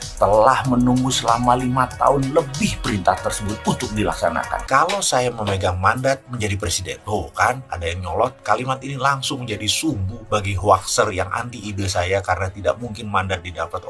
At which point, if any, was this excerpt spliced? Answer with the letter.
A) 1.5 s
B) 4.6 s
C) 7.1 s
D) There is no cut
B